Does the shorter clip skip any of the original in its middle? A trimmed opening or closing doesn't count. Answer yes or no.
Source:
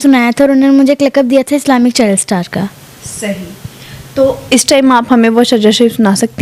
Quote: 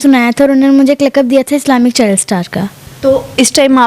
yes